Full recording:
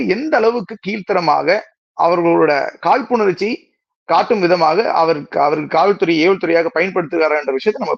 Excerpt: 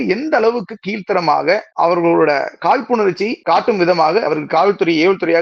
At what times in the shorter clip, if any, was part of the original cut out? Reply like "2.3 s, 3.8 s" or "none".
1.7 s, 3.4 s, 4.3 s